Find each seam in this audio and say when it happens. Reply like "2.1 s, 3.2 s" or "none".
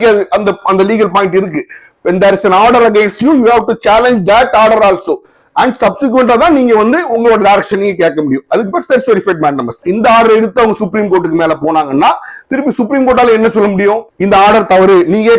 9.8 s